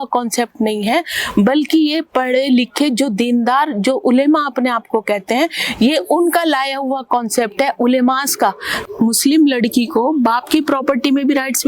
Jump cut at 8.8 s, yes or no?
yes